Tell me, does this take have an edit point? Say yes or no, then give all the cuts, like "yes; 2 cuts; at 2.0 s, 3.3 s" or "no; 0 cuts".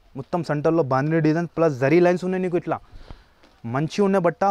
no; 0 cuts